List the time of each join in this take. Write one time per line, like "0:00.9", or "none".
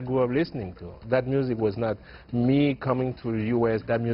0:01.0